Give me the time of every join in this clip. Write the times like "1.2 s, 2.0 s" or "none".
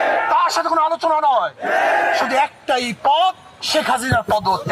none